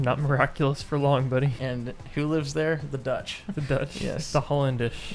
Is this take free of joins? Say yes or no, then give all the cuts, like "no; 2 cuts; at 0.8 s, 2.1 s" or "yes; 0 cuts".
no; 1 cut; at 1.5 s